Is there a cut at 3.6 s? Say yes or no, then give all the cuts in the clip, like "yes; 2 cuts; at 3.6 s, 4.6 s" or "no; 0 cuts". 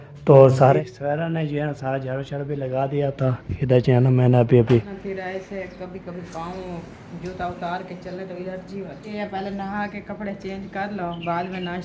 no; 3 cuts; at 0.7 s, 5.0 s, 9.1 s